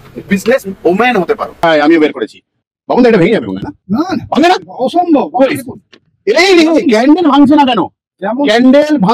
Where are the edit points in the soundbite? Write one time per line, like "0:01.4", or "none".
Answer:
0:01.6